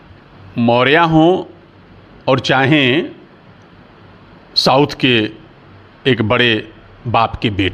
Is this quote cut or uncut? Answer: uncut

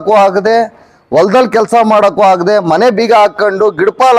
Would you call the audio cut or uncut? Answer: uncut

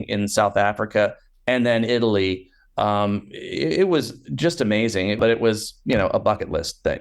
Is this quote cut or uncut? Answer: cut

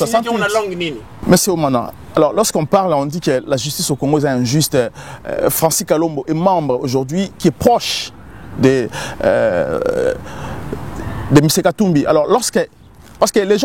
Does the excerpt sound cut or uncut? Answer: cut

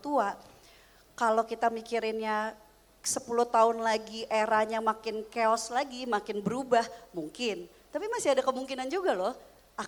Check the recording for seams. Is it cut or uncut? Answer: uncut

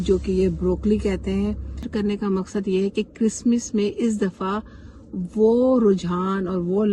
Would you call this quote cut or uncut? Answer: cut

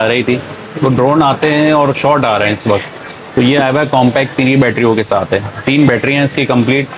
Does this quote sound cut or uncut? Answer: uncut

